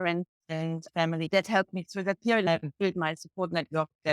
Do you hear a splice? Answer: yes; 2 cuts; at 1.3 s, 2.5 s

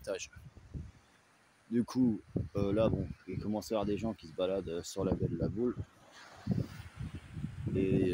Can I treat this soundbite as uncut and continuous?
yes; 0 cuts

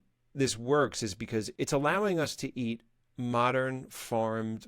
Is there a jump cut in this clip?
yes; 1 cut; at 1.5 s

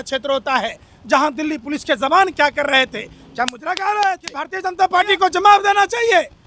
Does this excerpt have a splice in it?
yes; 1 cut; at 4.6 s

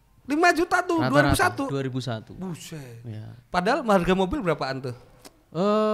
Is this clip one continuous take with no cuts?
yes; 0 cuts

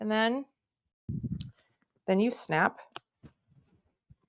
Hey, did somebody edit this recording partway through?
yes; 1 cut; at 1.1 s

